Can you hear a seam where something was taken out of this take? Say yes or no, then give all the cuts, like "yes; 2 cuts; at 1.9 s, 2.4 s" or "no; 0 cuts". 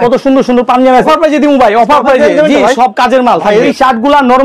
yes; 2 cuts; at 1.1 s, 3.7 s